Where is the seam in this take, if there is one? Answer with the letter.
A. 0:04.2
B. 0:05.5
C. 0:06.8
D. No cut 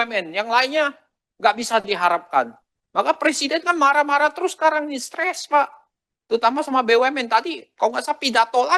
D